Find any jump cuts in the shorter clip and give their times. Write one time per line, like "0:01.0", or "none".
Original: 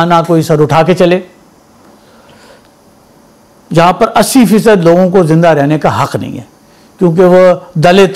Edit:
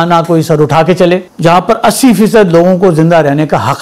0:01.3